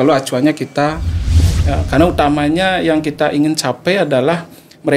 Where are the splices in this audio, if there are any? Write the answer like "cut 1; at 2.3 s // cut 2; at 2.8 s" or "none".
cut 1; at 1.3 s